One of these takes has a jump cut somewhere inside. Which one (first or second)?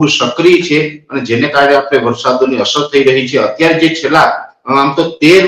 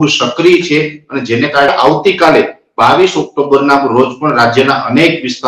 second